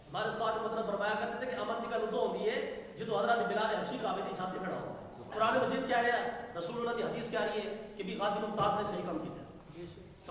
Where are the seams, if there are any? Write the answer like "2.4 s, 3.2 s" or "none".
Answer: 5.3 s